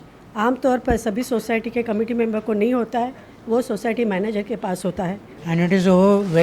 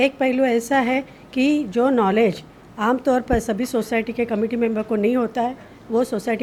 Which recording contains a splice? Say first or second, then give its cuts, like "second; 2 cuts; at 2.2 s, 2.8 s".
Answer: first; 1 cut; at 5.3 s